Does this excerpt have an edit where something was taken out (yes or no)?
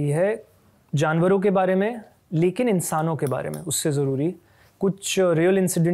no